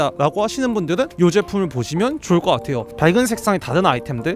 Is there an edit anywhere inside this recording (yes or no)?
yes